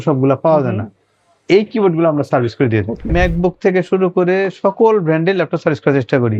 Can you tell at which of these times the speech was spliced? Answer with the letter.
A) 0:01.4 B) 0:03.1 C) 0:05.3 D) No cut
B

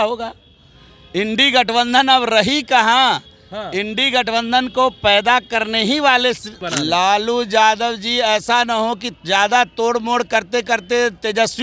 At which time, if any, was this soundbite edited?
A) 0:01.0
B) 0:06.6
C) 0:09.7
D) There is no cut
B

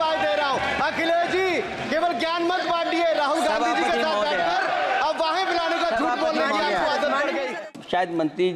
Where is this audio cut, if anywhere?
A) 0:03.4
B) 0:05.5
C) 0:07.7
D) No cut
C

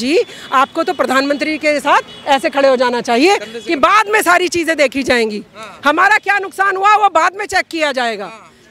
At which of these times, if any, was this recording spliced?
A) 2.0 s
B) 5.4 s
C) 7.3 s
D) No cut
D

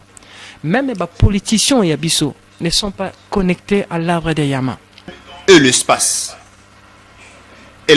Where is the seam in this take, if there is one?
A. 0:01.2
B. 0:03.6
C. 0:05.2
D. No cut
C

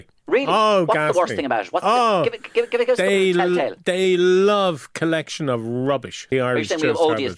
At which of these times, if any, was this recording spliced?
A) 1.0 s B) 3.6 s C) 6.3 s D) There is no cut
C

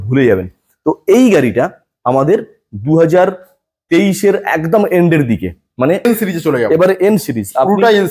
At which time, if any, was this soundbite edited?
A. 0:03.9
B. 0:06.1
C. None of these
B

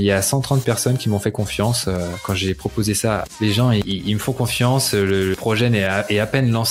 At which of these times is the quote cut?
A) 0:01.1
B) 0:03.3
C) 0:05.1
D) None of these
B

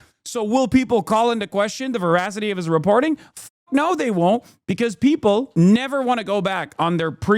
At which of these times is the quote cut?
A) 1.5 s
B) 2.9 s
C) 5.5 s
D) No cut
C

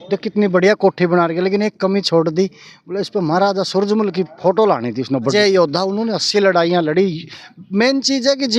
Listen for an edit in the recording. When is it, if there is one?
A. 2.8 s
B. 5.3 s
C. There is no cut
B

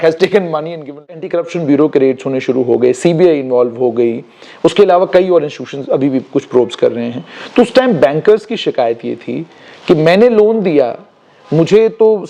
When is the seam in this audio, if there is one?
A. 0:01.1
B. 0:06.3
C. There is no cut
A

